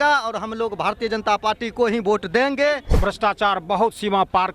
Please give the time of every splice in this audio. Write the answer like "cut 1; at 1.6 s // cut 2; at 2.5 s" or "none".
cut 1; at 3.0 s